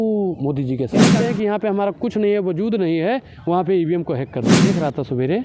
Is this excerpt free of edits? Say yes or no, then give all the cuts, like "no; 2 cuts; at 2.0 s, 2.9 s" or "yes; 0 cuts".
no; 2 cuts; at 1.1 s, 4.6 s